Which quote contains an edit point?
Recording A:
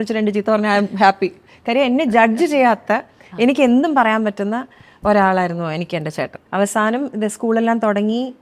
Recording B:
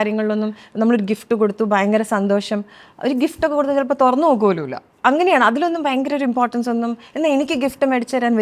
A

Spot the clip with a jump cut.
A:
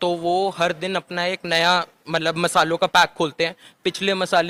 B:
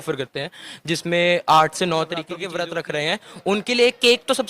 B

